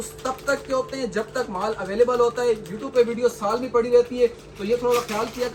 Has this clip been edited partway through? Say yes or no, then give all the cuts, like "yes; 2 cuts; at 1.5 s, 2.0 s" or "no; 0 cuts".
no; 0 cuts